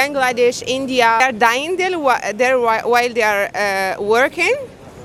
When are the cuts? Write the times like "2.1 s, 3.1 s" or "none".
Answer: none